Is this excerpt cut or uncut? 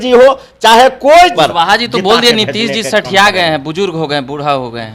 cut